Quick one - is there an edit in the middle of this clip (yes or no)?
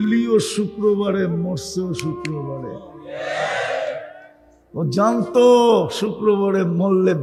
no